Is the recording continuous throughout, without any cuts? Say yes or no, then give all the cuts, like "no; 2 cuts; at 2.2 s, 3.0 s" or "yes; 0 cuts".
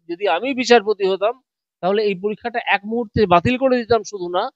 yes; 0 cuts